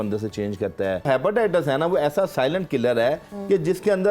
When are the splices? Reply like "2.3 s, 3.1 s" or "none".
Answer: 1.1 s